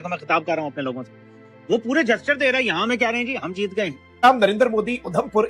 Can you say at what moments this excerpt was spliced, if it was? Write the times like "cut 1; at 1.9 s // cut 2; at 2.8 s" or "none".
cut 1; at 4.0 s